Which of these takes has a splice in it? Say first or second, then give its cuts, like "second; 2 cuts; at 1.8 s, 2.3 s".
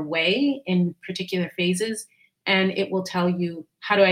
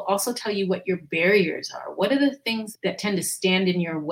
second; 1 cut; at 2.6 s